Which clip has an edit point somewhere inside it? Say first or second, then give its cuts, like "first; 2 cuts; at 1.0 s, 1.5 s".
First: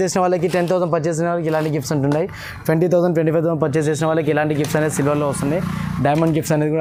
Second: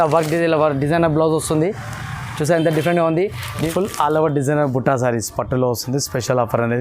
second; 1 cut; at 3.7 s